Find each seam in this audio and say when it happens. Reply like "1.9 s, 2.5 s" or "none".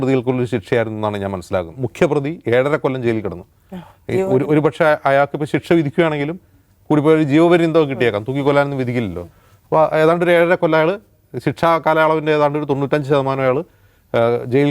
1.8 s